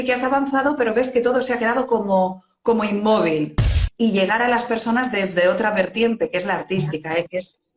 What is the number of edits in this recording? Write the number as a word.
one